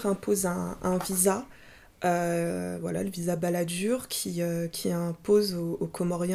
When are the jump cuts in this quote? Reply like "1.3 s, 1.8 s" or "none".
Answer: none